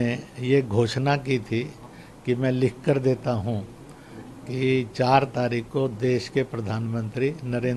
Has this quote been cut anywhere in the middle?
no; 0 cuts

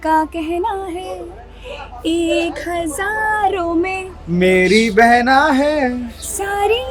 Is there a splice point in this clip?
no; 0 cuts

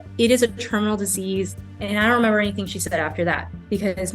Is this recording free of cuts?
no; 1 cut; at 1.5 s

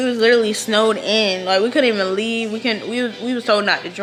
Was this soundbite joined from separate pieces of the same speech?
no; 0 cuts

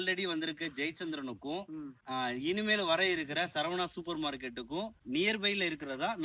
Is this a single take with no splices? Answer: yes; 0 cuts

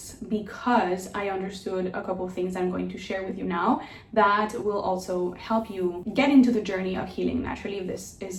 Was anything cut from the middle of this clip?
no; 0 cuts

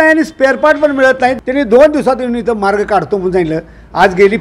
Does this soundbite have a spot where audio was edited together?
yes; 1 cut; at 1.4 s

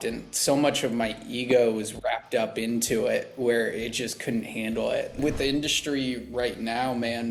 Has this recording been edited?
yes; 1 cut; at 5.2 s

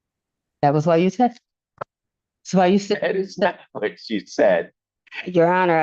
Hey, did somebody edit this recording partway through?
no; 0 cuts

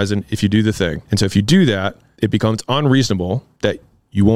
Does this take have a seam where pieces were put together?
yes; 3 cuts; at 1.0 s, 2.0 s, 3.5 s

